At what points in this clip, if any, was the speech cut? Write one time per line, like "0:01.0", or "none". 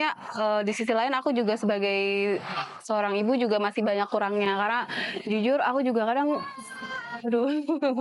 none